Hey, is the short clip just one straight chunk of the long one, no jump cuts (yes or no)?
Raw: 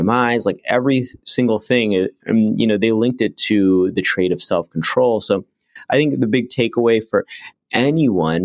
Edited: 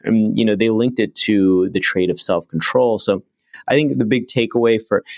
yes